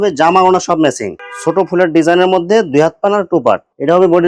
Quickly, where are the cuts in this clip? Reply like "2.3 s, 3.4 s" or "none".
1.1 s